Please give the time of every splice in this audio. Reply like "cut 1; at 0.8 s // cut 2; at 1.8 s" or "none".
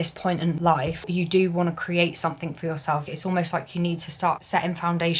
cut 1; at 0.9 s // cut 2; at 3.0 s // cut 3; at 4.4 s